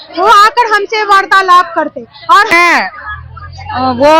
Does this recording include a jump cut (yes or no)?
yes